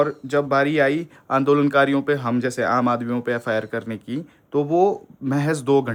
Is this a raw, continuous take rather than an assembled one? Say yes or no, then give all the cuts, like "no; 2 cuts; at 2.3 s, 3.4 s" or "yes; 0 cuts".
yes; 0 cuts